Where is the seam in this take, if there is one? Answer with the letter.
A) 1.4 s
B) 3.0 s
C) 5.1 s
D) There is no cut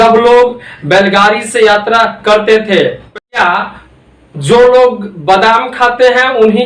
B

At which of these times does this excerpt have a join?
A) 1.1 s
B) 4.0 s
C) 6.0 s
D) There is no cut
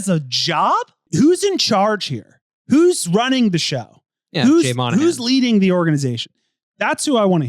A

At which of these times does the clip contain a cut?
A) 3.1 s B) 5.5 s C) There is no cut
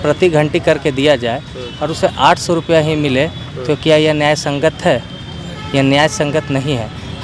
C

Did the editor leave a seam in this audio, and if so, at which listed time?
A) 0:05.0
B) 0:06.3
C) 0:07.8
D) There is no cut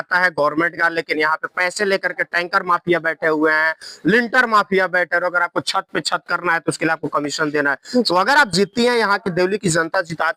D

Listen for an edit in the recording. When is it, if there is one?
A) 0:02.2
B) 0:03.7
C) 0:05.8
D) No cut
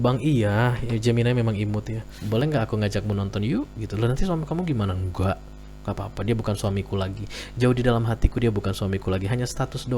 A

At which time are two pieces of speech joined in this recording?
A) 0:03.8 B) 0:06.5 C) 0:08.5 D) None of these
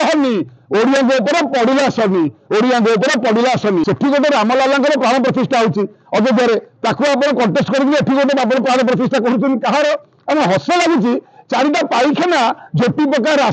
A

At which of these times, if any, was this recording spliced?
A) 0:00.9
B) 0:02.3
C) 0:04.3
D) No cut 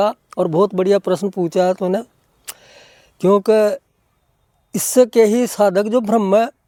D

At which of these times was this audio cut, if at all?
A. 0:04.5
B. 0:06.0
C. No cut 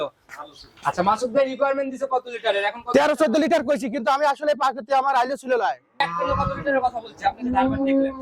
B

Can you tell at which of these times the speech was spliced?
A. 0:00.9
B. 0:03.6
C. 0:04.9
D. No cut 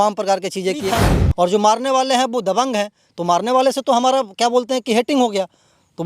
A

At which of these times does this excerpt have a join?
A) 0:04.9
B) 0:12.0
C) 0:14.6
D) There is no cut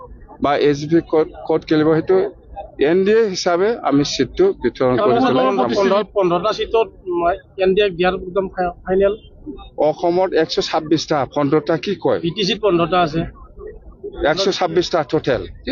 D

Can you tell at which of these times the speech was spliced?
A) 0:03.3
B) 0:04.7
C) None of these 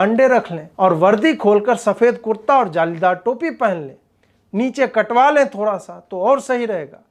C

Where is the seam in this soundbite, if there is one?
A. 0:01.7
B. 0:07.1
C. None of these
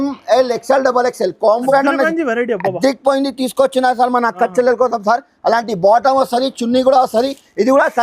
A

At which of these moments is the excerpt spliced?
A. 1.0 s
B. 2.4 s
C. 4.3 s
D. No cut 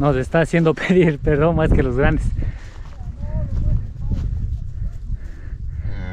D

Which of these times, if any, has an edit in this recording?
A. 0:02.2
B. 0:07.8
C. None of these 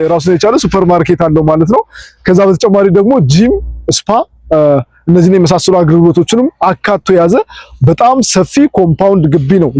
C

